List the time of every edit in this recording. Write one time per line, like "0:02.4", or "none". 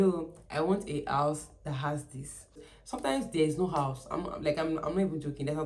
0:02.7